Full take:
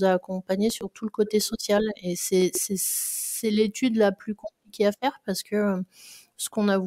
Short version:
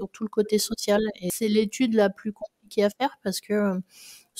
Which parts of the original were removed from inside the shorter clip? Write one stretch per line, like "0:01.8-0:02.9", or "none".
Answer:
0:02.1-0:03.3

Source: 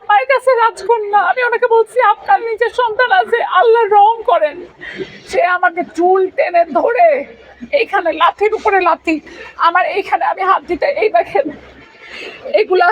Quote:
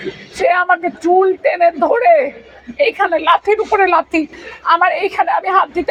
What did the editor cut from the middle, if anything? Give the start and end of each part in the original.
none

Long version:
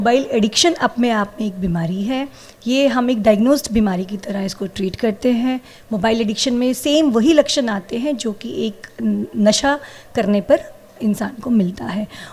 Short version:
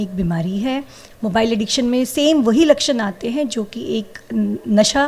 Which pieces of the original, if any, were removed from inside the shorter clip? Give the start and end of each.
0:02.5-0:05.7

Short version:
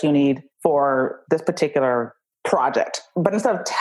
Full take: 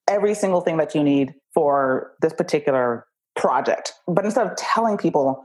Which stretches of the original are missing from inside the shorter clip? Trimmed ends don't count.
none

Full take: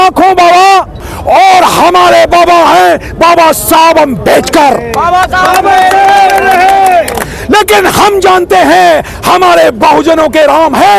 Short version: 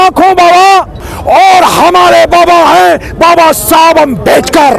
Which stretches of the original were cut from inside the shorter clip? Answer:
none

